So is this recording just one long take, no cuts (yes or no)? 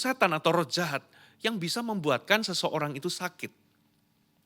yes